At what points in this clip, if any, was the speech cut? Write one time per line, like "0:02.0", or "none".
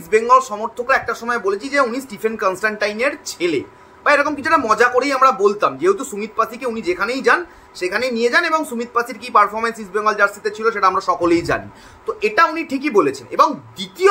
none